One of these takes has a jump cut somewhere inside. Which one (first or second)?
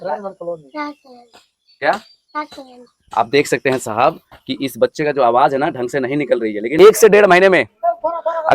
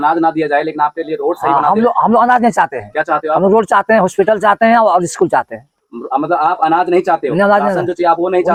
first